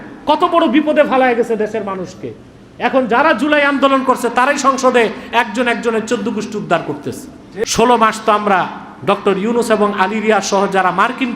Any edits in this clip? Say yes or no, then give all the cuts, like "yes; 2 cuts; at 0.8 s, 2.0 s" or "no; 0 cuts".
yes; 1 cut; at 7.6 s